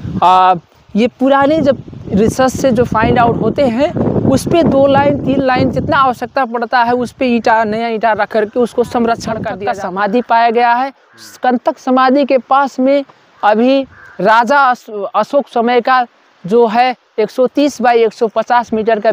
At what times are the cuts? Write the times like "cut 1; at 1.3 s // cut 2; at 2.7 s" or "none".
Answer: cut 1; at 9.5 s